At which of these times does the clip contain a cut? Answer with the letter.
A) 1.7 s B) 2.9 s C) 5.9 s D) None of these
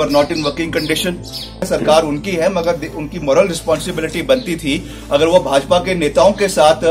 A